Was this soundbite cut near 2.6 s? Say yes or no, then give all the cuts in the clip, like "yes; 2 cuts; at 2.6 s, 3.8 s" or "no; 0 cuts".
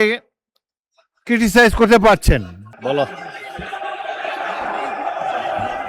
yes; 1 cut; at 2.6 s